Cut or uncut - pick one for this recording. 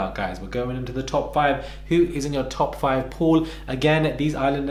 uncut